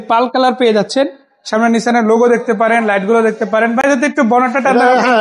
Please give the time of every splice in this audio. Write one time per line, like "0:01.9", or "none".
none